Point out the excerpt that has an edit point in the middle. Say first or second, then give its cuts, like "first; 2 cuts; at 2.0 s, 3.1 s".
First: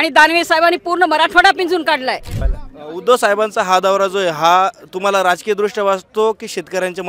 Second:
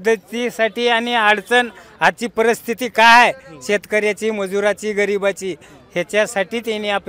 first; 1 cut; at 2.3 s